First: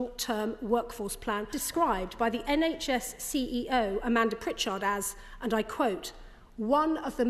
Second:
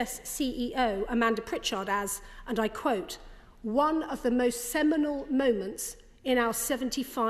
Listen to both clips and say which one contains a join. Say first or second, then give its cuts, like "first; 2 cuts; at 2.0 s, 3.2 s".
first; 1 cut; at 1.6 s